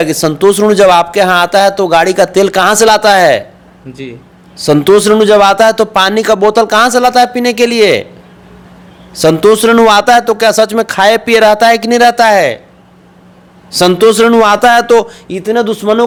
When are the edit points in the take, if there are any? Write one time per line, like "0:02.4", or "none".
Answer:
none